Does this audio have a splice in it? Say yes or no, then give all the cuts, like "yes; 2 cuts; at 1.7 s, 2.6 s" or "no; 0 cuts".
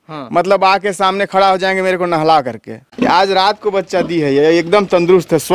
yes; 1 cut; at 2.9 s